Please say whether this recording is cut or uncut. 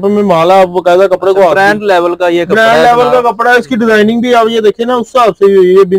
uncut